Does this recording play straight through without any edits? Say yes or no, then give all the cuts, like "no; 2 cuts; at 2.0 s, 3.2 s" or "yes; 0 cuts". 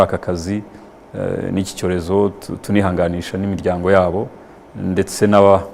yes; 0 cuts